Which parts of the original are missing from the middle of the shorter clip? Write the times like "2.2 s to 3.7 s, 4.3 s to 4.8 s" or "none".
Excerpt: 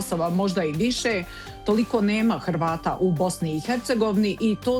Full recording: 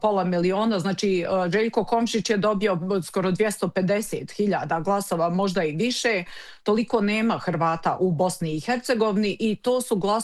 none